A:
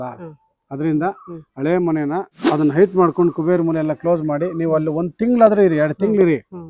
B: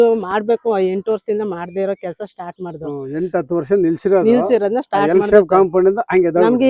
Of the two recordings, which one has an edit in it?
A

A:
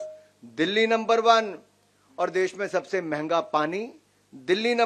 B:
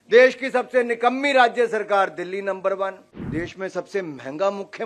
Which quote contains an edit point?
B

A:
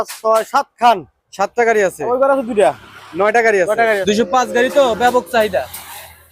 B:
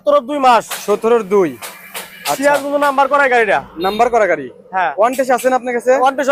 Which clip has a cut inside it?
A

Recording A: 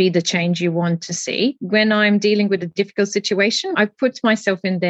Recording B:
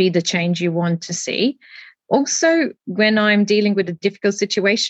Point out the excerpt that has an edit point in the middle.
A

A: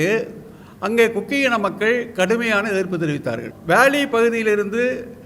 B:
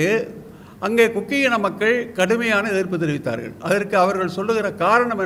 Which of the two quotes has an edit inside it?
A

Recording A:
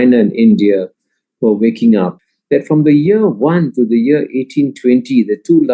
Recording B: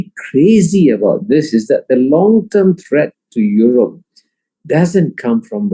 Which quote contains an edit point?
A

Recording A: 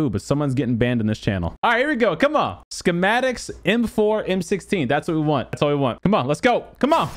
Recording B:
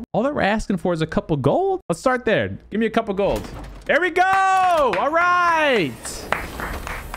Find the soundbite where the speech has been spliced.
A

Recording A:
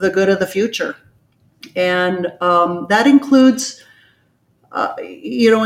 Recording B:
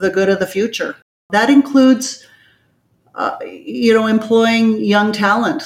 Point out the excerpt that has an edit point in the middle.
B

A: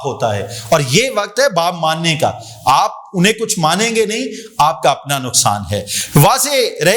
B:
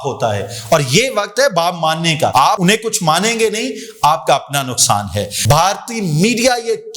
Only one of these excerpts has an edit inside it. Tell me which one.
B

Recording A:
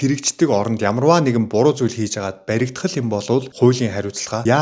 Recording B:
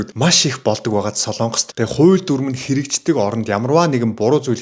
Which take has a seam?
B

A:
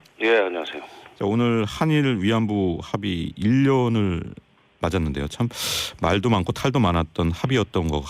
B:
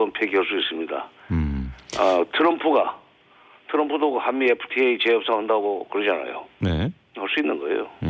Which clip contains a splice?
B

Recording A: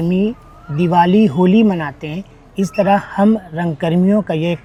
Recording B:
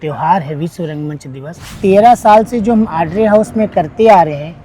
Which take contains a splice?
B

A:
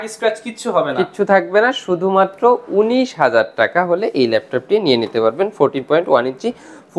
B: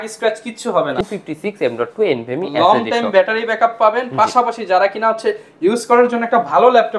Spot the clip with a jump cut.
B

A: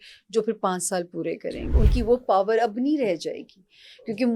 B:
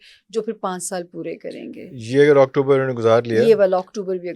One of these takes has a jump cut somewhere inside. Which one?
A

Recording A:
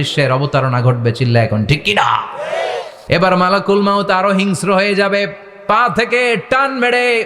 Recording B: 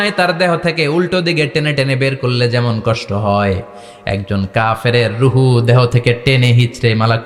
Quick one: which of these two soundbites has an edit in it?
A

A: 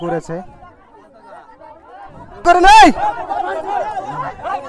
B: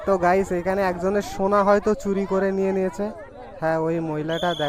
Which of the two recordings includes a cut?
A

